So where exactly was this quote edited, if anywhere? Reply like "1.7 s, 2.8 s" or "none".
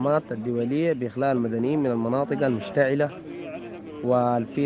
none